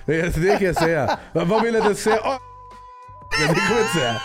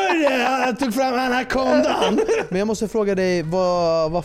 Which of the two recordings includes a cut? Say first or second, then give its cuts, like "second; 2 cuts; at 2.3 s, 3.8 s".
second; 1 cut; at 2.4 s